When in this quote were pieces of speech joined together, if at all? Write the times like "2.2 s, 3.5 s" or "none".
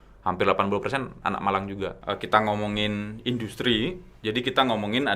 2.0 s

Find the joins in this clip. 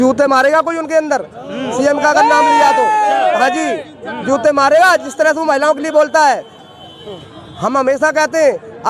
none

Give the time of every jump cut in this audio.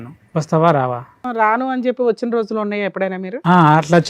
1.2 s

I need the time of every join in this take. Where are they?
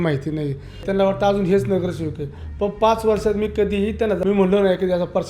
4.2 s

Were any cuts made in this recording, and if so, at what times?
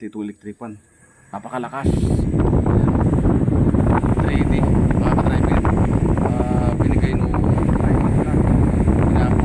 none

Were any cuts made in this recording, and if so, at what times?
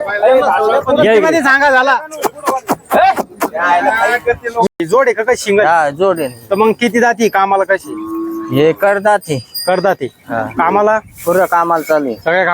4.7 s

